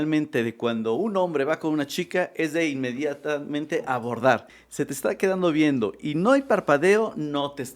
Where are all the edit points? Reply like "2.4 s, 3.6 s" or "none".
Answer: 4.6 s

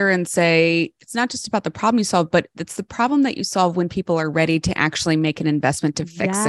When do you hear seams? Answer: none

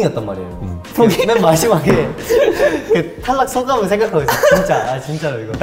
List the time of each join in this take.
none

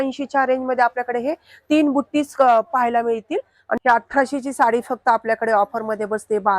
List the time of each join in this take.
3.8 s

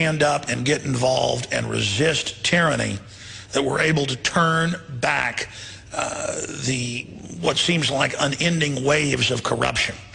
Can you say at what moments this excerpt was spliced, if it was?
7.2 s

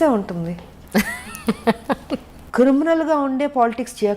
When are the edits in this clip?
2.4 s

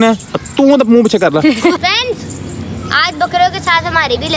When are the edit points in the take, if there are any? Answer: 1.8 s

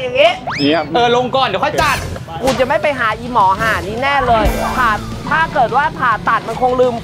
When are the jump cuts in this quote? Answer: none

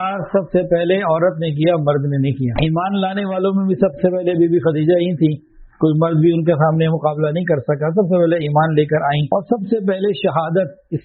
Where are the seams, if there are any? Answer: 2.5 s, 9.2 s

